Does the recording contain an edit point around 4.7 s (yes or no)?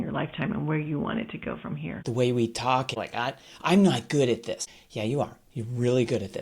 yes